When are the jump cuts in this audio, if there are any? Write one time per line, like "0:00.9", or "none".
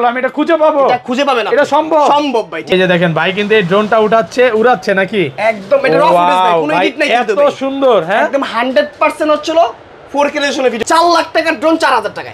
0:02.7
0:10.8